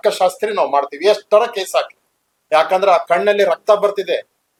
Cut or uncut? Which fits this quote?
uncut